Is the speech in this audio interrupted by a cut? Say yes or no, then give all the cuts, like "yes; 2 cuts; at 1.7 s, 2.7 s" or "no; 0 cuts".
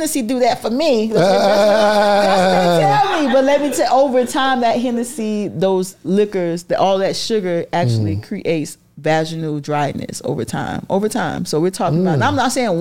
no; 0 cuts